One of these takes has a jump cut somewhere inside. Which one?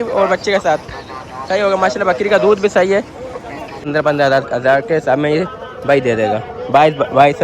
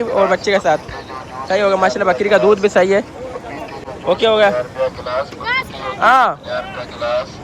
first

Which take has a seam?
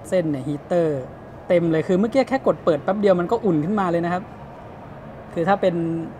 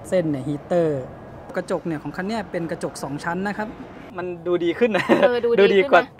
second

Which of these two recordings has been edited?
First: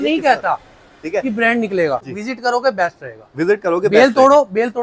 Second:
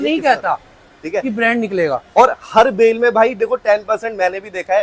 first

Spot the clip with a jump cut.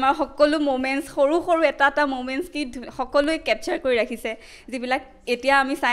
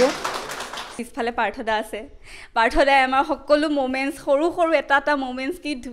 second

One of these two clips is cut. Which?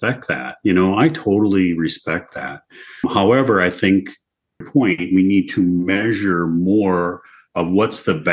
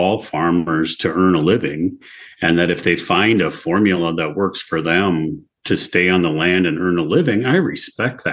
first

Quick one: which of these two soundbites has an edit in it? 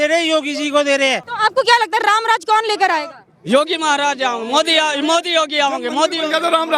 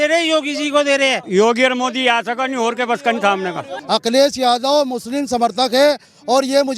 second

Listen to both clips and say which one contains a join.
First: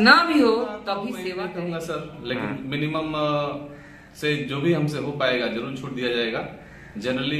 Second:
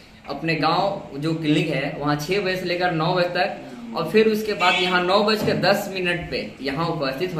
first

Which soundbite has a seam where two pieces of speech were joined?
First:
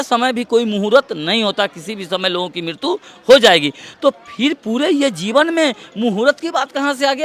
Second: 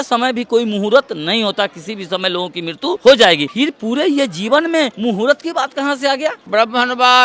second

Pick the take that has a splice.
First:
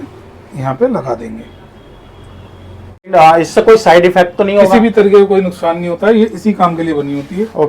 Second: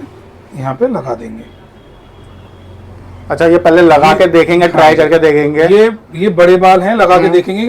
first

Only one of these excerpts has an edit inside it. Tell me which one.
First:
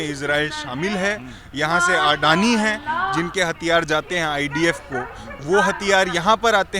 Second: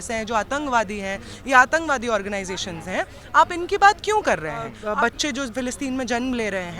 second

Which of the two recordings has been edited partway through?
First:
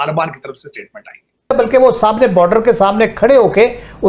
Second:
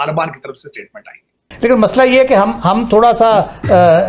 first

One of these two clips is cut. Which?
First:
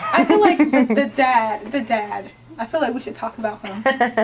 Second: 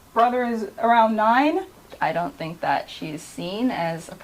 second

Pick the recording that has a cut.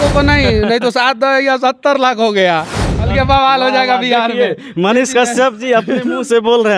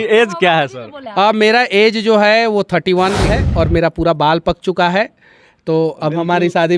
second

